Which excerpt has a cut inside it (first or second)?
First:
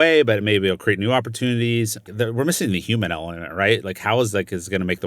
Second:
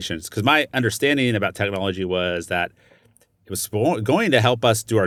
first